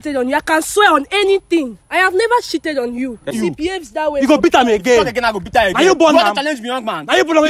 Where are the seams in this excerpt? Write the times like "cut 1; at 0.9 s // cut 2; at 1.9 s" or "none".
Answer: cut 1; at 3.3 s

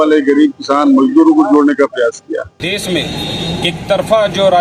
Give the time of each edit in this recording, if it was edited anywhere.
cut 1; at 2.7 s

